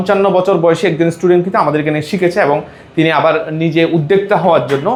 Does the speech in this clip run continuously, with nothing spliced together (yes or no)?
yes